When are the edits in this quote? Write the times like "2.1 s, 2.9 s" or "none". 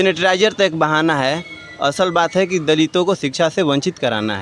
none